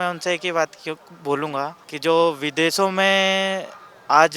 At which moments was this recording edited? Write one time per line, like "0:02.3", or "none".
0:01.8